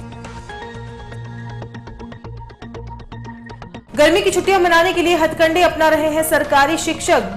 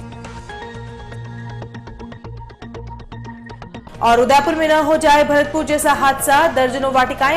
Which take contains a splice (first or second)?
second